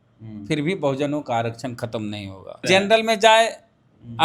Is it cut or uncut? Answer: cut